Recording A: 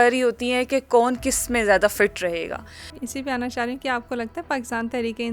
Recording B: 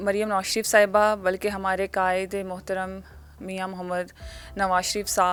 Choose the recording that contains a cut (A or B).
A